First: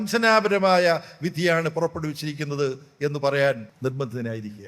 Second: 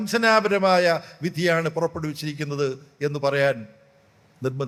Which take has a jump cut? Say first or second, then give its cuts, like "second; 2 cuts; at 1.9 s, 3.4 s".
first; 1 cut; at 3.7 s